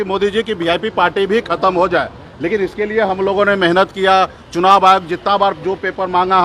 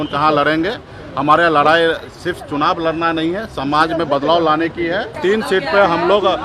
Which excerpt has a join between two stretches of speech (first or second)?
second